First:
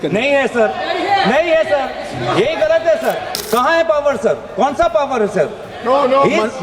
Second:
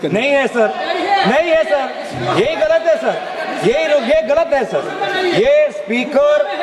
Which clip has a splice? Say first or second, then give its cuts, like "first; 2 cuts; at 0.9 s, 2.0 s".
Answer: first; 1 cut; at 3.3 s